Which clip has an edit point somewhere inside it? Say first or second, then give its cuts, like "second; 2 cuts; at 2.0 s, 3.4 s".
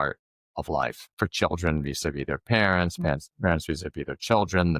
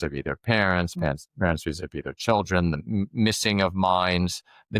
first; 1 cut; at 1.0 s